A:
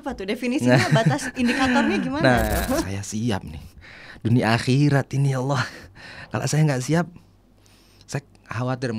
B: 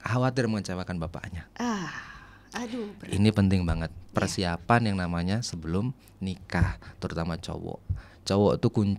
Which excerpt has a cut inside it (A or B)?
A